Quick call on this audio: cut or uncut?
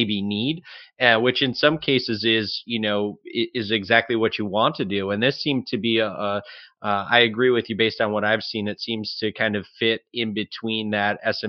uncut